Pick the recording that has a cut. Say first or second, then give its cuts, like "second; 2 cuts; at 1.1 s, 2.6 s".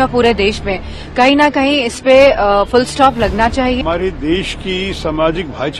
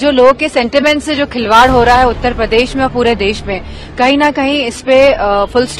first; 1 cut; at 4.1 s